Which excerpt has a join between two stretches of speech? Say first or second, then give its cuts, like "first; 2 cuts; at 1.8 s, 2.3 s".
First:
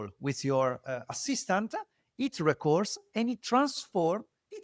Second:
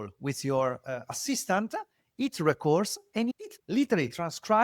second; 1 cut; at 3.4 s